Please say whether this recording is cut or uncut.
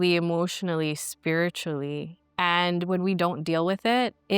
cut